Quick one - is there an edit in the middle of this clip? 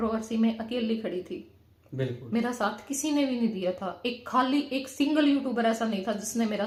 no; 0 cuts

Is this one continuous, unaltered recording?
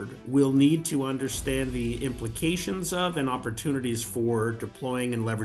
yes; 0 cuts

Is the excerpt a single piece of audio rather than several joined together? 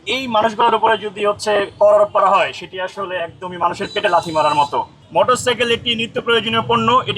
no; 1 cut; at 5.0 s

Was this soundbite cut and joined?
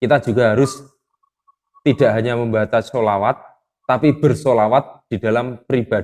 no; 0 cuts

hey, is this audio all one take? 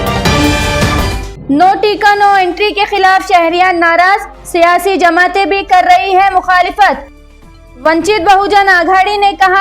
yes; 0 cuts

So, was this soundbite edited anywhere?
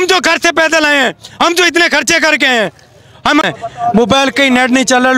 yes; 1 cut; at 3.5 s

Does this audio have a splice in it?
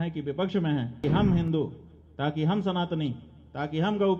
yes; 1 cut; at 1.0 s

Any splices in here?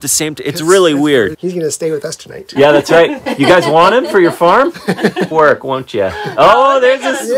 yes; 2 cuts; at 1.4 s, 5.3 s

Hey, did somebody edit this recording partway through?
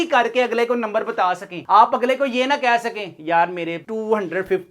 no; 0 cuts

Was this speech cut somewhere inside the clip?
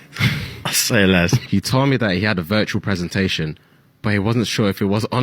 yes; 1 cut; at 1.4 s

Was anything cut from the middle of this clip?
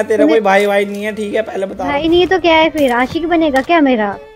yes; 1 cut; at 1.9 s

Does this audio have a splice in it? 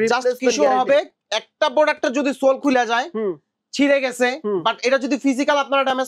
no; 0 cuts

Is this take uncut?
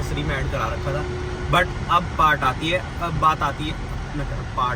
yes; 0 cuts

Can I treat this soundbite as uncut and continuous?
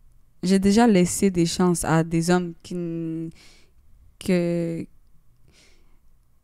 yes; 0 cuts

